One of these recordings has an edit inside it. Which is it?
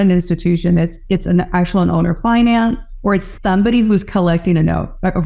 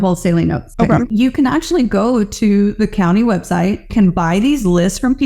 second; 2 cuts; at 1.1 s, 3.9 s

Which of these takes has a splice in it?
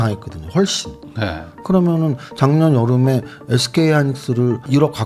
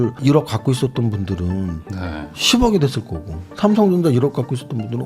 first; 1 cut; at 1.5 s

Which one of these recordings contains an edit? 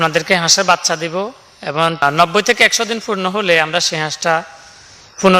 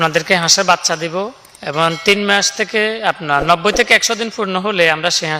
first; 1 cut; at 2.0 s

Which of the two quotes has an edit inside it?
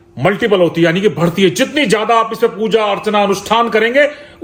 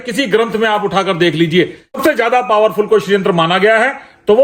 second; 1 cut; at 2.0 s

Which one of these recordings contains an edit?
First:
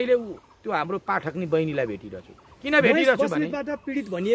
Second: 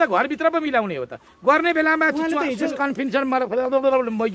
second; 1 cut; at 2.7 s

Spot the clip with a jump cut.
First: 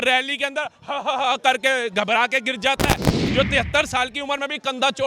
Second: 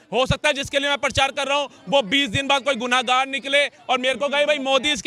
first; 1 cut; at 3.2 s

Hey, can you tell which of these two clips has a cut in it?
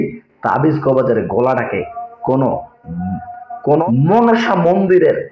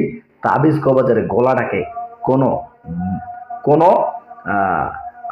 first; 1 cut; at 3.8 s

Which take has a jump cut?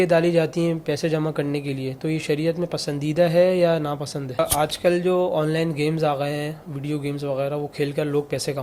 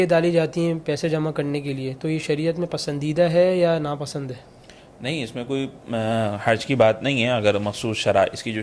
first; 1 cut; at 4.4 s

